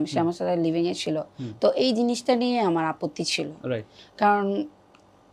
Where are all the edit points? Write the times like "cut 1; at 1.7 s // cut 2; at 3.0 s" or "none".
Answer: none